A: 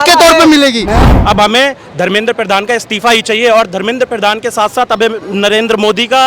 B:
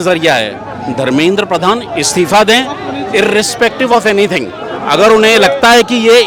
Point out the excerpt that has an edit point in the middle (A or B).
A